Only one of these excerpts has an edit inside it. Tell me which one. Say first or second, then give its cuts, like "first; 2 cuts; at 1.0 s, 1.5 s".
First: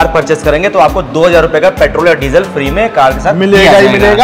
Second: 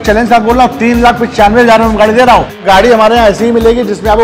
second; 1 cut; at 2.6 s